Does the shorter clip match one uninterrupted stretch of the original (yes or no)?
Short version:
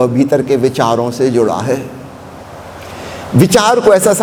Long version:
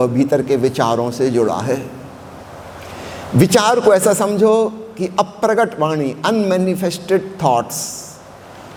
yes